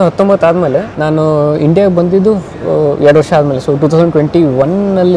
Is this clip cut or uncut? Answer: cut